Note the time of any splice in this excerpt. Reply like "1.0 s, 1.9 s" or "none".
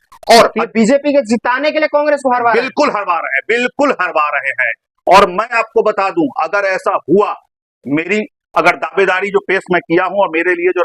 none